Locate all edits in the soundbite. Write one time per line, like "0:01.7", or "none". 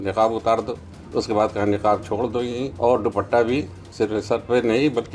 0:00.9
0:02.7
0:03.8